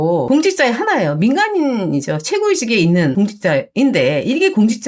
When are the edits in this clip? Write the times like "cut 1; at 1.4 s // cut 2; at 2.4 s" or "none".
cut 1; at 3.1 s